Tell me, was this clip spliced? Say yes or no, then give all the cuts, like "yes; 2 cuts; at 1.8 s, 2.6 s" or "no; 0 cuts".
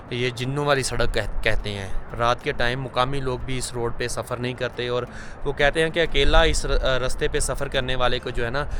no; 0 cuts